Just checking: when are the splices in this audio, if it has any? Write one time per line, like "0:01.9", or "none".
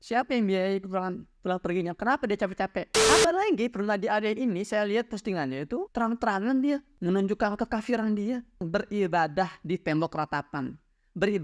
0:02.9
0:05.9
0:08.6